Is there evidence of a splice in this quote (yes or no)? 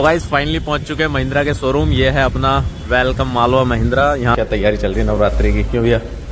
yes